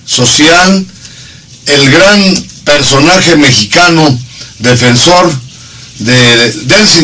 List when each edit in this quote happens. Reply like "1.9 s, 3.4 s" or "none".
1.6 s